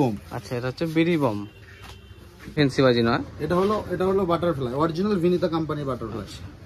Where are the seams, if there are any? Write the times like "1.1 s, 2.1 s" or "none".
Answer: 2.6 s